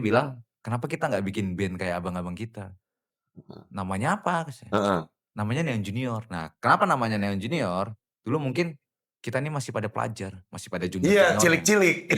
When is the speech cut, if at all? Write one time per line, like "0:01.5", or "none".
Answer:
none